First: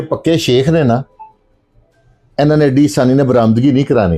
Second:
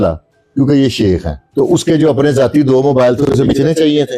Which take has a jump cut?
second; 1 cut; at 1.4 s

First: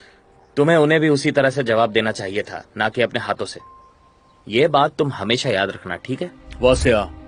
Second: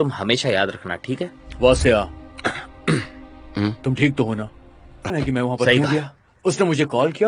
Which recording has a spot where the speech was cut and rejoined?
second; 1 cut; at 5.1 s

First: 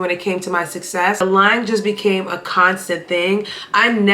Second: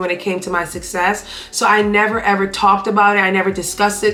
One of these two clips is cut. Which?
first; 1 cut; at 1.2 s

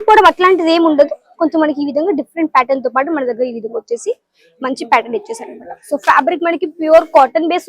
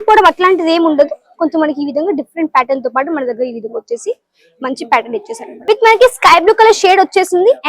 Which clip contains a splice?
second; 1 cut; at 5.5 s

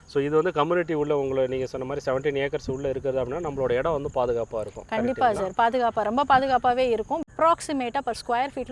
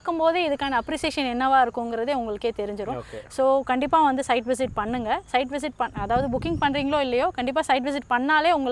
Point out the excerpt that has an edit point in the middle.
first; 1 cut; at 7.3 s

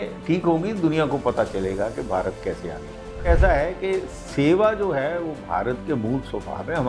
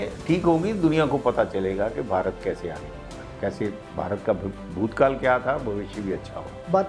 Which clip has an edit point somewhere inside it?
first; 1 cut; at 3.3 s

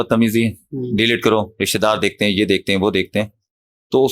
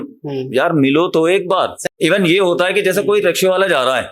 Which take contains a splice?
second; 1 cut; at 1.8 s

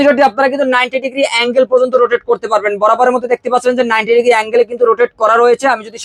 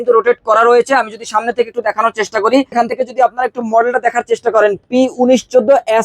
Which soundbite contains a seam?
second; 1 cut; at 2.7 s

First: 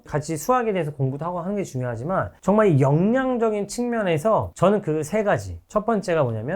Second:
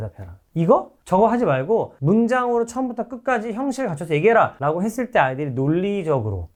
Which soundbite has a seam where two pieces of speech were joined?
first; 1 cut; at 4.5 s

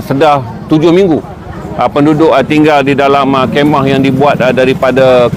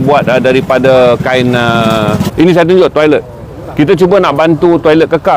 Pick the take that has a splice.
second; 1 cut; at 2.2 s

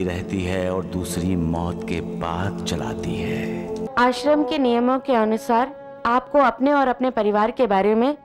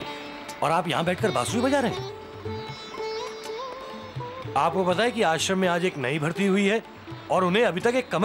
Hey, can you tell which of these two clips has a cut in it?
first; 1 cut; at 3.8 s

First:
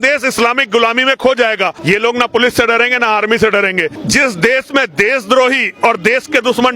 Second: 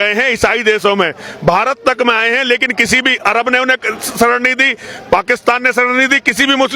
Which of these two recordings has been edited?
first; 2 cuts; at 1.8 s, 4.0 s

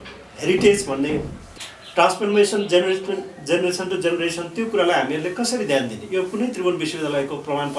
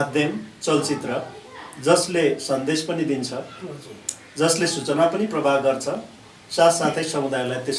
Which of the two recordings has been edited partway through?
first; 1 cut; at 1.4 s

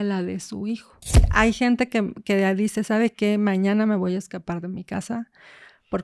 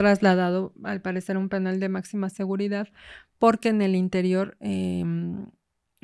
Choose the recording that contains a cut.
first; 1 cut; at 1.3 s

